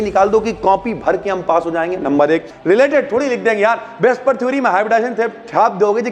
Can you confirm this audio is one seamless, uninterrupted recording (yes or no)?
no